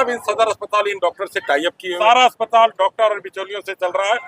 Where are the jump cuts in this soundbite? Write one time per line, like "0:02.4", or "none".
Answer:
0:01.9